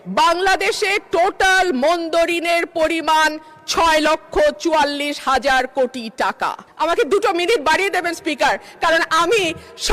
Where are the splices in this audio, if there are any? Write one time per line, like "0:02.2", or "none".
0:06.6